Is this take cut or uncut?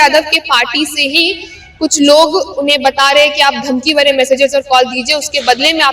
uncut